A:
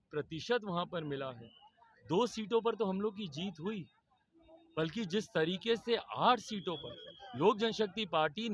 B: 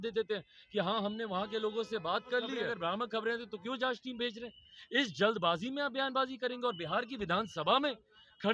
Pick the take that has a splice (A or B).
B